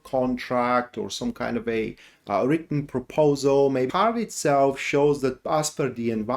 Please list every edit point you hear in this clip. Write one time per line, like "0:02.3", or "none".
0:03.9